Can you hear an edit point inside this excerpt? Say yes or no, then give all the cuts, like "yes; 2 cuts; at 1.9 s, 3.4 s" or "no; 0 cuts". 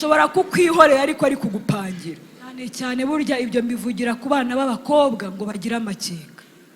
yes; 1 cut; at 2.7 s